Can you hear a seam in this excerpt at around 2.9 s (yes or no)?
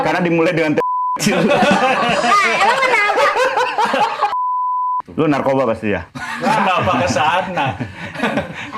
no